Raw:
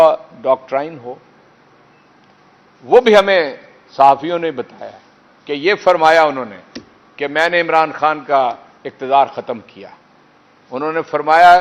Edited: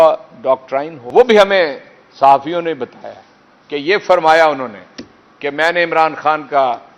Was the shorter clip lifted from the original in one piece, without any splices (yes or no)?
no